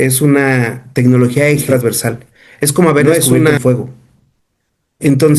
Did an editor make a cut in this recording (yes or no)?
yes